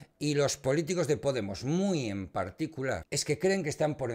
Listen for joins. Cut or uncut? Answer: cut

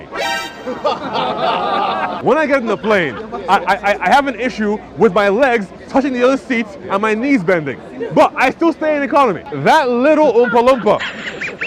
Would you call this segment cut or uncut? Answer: cut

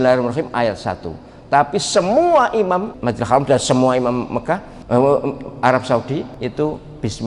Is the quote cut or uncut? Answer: cut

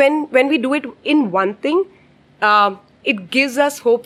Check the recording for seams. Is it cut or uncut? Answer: uncut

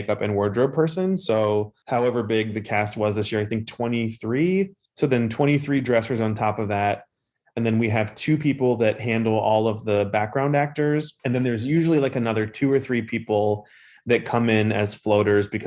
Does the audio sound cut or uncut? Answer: uncut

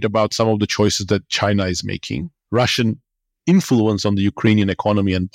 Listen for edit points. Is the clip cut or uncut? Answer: cut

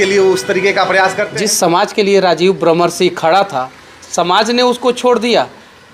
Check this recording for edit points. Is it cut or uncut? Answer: cut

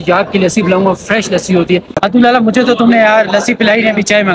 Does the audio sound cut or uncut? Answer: cut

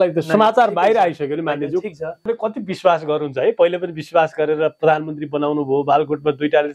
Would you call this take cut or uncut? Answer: cut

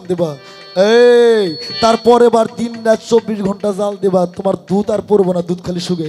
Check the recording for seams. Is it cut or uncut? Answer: uncut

